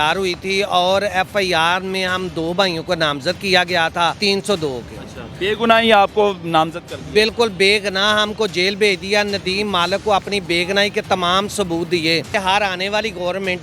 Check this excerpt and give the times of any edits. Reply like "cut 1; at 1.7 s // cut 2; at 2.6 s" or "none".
cut 1; at 4.2 s // cut 2; at 12.3 s

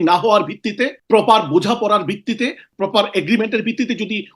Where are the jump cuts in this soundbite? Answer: cut 1; at 1.0 s // cut 2; at 2.7 s

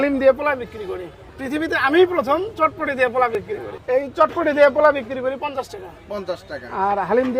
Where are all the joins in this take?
none

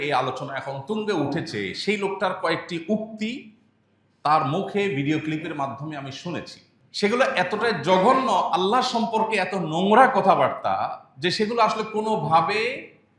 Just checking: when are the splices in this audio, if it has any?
none

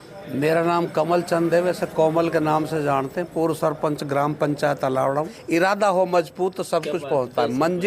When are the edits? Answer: cut 1; at 5.4 s

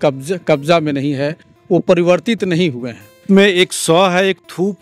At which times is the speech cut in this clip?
cut 1; at 3.2 s

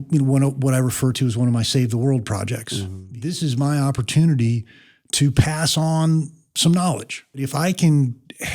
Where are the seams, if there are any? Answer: cut 1; at 3.0 s // cut 2; at 7.4 s

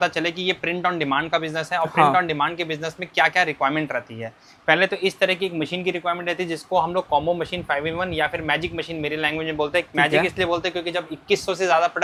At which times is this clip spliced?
none

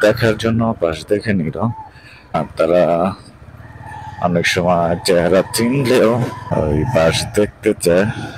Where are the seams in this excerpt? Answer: cut 1; at 2.3 s // cut 2; at 6.4 s

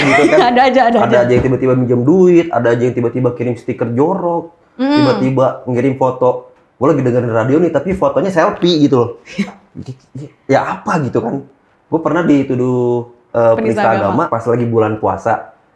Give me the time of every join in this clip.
none

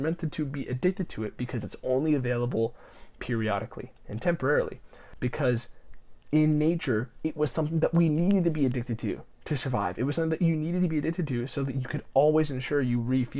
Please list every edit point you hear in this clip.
cut 1; at 5.0 s

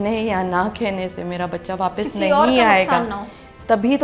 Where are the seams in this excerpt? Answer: none

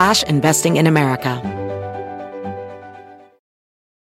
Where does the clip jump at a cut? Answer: cut 1; at 1.4 s

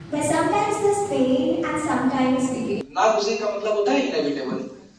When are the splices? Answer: cut 1; at 2.8 s

